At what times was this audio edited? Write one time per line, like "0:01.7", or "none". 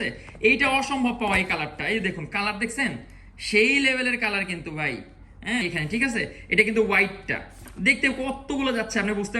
0:05.6